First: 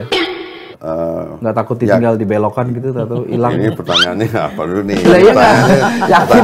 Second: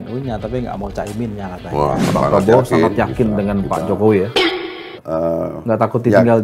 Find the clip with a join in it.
second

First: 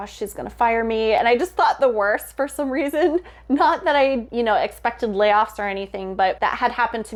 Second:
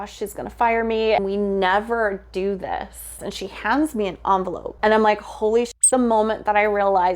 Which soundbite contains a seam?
second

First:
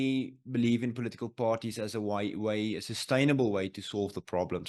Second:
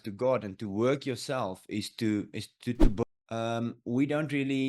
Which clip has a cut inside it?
second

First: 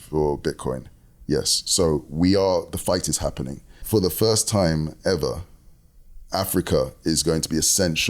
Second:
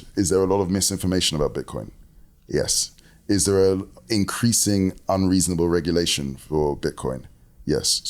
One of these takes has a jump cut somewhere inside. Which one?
first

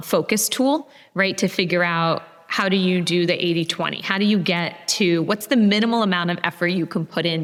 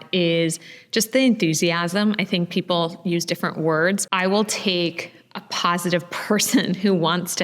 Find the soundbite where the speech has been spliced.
second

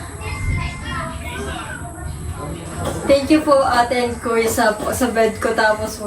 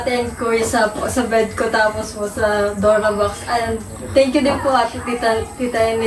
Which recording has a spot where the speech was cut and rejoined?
first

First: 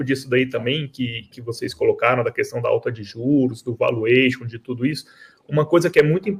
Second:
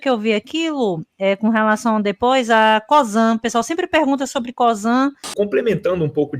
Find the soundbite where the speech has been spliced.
second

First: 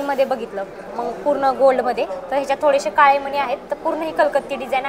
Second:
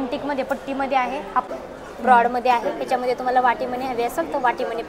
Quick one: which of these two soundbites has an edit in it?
second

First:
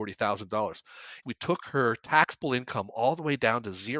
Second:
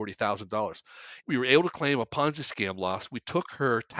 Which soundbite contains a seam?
first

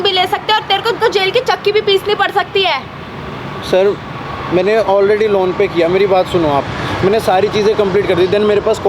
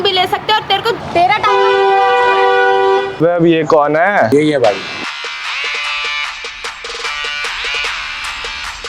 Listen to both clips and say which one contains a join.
second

